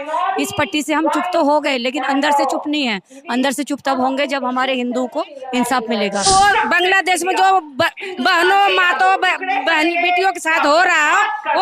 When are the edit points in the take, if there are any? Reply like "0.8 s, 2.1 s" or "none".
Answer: 6.3 s